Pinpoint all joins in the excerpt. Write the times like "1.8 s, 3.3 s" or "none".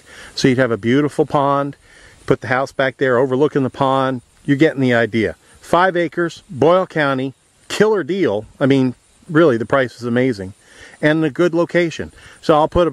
10.5 s